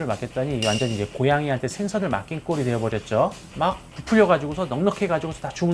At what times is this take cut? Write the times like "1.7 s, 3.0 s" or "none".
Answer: none